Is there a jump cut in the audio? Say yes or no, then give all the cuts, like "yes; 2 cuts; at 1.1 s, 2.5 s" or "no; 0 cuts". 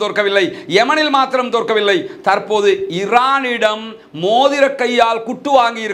no; 0 cuts